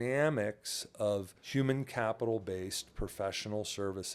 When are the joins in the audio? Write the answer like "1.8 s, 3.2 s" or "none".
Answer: 1.4 s